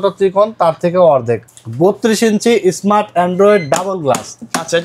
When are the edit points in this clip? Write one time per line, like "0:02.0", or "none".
0:01.4